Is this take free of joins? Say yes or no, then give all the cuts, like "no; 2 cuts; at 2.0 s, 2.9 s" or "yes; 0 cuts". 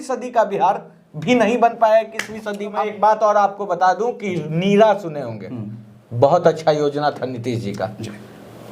no; 1 cut; at 2.7 s